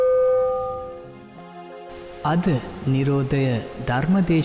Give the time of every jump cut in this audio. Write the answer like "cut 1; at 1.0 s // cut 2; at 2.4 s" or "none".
cut 1; at 1.1 s